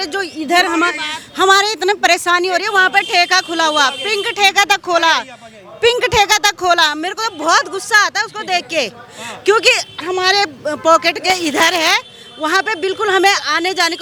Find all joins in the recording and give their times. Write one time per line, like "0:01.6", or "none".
none